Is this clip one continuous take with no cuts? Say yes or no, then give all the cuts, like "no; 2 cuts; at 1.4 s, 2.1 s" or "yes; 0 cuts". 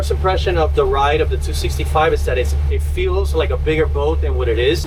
yes; 0 cuts